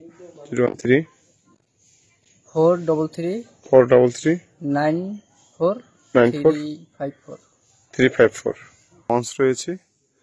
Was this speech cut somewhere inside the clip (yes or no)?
yes